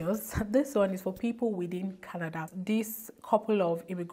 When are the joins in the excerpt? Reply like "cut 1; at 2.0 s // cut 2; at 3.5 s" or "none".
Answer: cut 1; at 2.5 s